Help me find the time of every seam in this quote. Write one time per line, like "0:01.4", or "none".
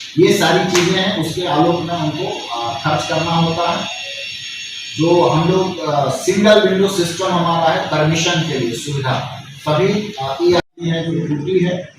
0:10.7